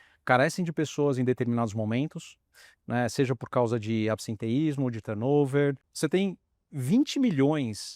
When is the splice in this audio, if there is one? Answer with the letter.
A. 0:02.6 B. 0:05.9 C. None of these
B